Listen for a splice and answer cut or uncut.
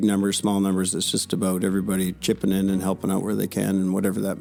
uncut